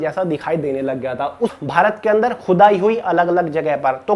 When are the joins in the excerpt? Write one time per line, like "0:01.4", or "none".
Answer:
0:01.5